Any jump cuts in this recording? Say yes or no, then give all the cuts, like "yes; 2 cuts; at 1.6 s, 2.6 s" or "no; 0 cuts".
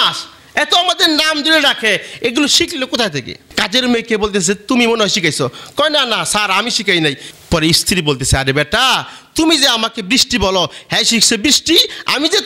yes; 1 cut; at 3.5 s